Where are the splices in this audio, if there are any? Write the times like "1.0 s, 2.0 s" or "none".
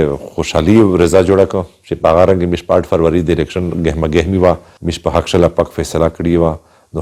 none